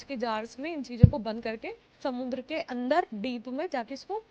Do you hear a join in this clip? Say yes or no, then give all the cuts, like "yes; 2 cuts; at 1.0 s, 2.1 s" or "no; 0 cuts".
yes; 1 cut; at 3.1 s